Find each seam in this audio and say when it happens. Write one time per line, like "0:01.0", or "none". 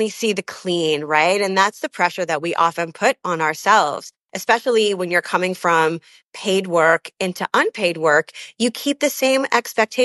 0:04.3